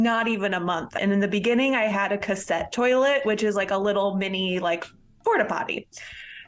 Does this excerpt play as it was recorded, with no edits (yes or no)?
no